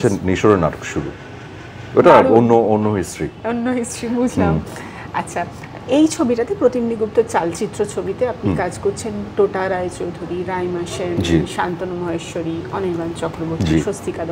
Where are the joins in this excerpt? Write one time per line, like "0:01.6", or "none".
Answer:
none

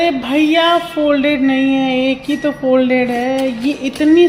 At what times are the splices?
none

